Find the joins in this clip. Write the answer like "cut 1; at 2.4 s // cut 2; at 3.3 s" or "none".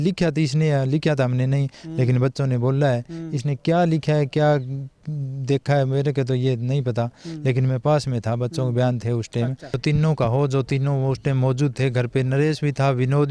cut 1; at 9.8 s